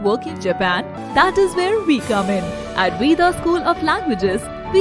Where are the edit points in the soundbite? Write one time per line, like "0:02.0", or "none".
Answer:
0:01.0